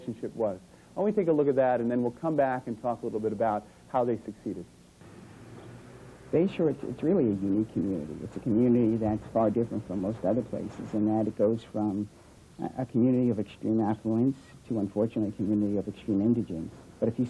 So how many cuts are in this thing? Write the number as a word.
one